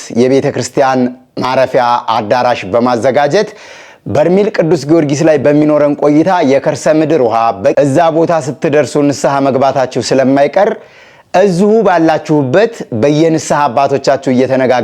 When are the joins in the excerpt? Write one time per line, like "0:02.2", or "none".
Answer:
0:07.7